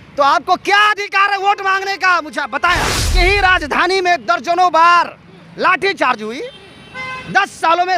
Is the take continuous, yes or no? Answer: no